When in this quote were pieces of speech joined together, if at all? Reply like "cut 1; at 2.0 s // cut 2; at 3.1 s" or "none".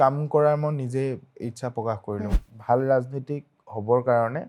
cut 1; at 2.4 s